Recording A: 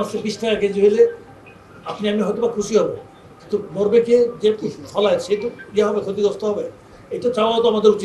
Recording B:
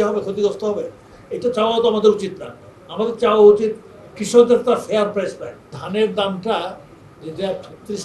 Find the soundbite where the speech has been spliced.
B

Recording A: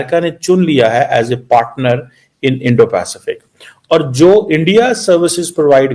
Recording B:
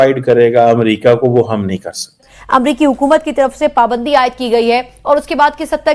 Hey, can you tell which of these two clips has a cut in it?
B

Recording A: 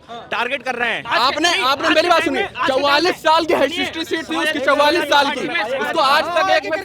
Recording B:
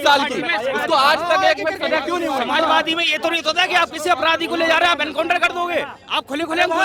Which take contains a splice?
A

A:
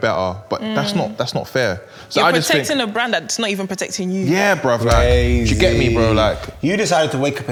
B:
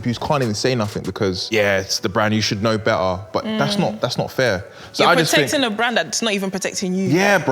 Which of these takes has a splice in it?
B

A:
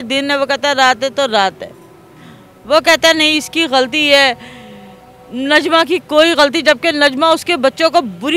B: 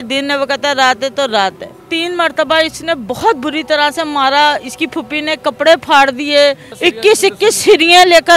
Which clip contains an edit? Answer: B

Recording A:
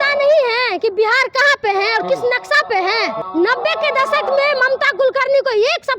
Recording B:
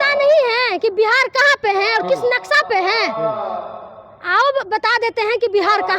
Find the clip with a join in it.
A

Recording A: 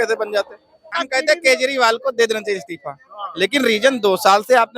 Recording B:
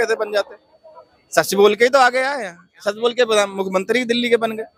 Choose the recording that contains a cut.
A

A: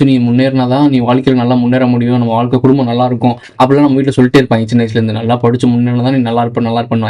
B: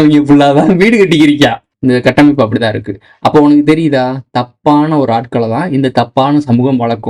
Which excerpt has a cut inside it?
B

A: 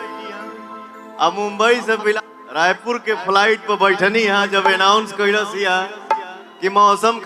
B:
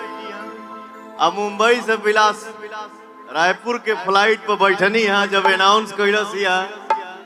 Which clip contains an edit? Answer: A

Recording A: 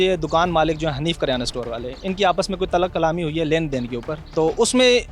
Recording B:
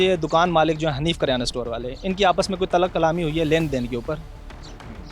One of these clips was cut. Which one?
A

